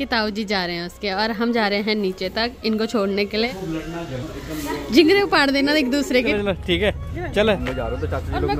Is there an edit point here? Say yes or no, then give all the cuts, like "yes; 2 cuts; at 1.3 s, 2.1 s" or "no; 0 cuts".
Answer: yes; 3 cuts; at 3.5 s, 6.3 s, 7.6 s